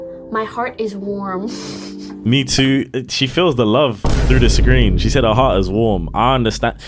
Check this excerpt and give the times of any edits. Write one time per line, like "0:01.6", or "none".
none